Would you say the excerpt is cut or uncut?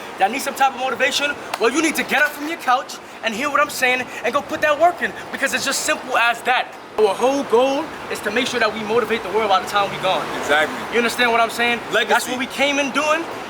cut